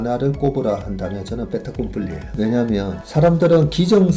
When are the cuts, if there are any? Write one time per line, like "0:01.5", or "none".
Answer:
0:02.3
0:03.0

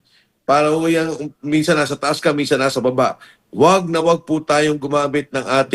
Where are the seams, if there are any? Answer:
none

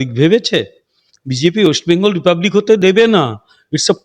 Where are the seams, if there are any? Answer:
none

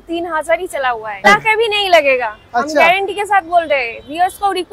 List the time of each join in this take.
0:01.2

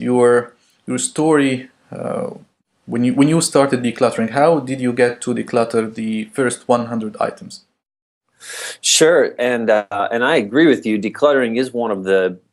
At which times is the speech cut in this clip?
0:02.3

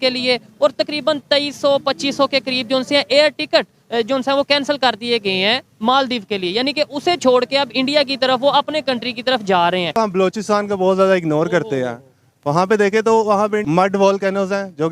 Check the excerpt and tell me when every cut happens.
0:10.0
0:13.6

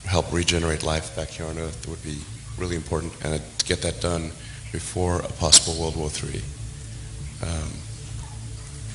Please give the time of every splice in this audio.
0:08.0

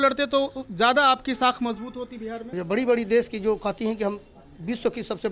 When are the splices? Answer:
0:02.5

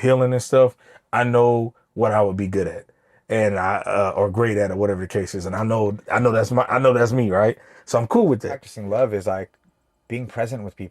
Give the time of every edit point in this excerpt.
0:08.7

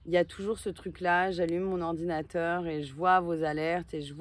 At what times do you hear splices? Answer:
none

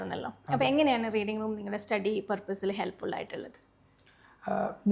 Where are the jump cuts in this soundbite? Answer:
none

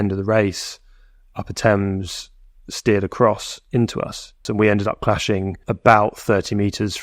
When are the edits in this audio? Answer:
0:04.4
0:05.7

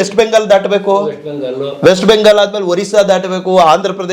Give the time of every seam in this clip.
none

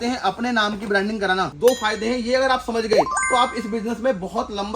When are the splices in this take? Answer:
0:01.5

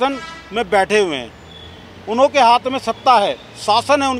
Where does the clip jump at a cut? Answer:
none

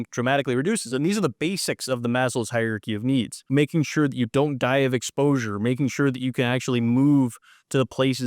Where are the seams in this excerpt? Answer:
0:03.4

